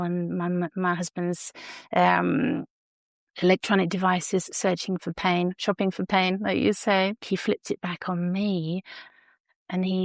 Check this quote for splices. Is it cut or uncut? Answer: cut